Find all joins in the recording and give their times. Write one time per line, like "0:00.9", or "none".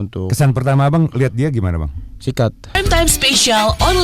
0:02.7